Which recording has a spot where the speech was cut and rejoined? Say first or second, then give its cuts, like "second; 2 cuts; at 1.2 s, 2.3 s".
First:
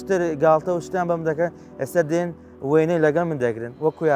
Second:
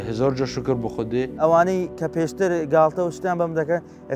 second; 1 cut; at 1.4 s